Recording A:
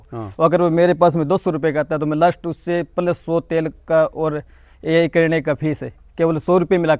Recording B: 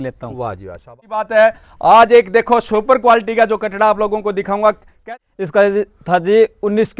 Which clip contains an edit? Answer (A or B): B